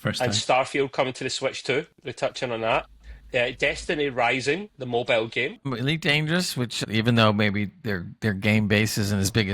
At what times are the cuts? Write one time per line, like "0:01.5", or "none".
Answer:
0:05.7
0:06.8